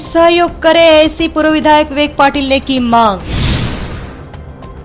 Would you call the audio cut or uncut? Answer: cut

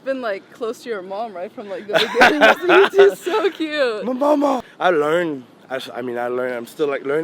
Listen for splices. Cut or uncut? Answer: cut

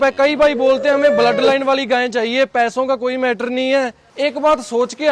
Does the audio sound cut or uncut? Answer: cut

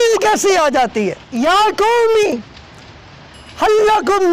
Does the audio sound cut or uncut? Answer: cut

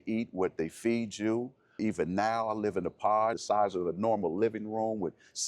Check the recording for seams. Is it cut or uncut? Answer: cut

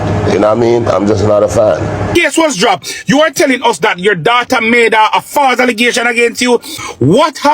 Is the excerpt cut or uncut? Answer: cut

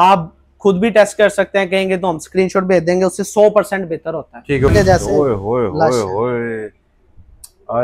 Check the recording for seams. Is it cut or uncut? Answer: cut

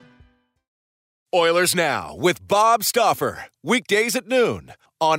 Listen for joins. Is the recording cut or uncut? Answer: cut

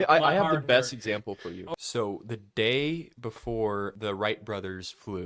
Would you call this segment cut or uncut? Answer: cut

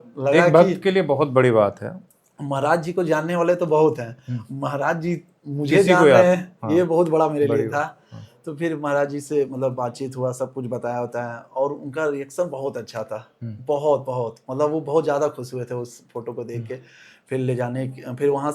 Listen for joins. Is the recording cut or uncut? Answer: uncut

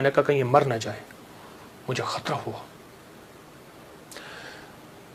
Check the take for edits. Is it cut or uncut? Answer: uncut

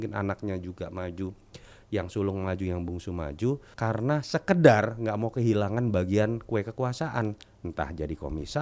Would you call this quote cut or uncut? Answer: cut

